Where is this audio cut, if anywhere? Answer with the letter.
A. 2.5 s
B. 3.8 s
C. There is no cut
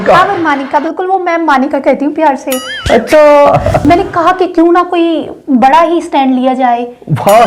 B